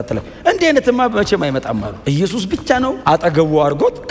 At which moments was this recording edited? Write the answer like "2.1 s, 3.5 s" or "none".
1.9 s, 3.0 s